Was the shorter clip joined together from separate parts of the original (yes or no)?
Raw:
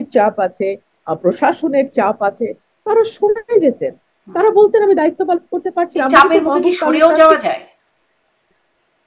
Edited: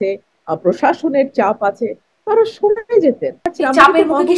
yes